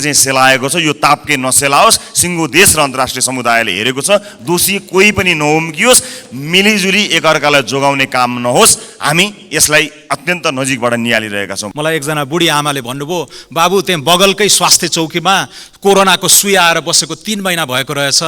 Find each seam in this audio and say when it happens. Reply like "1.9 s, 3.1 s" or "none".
11.6 s